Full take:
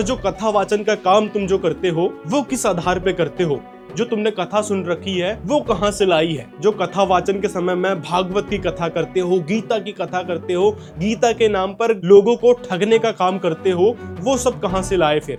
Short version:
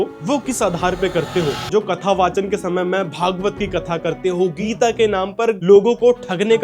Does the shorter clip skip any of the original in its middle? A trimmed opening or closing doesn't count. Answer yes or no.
yes